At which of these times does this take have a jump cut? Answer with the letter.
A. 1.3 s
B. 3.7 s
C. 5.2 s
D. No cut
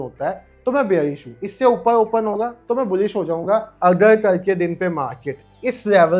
B